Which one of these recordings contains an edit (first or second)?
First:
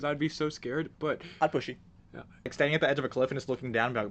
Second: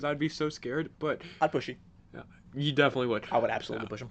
first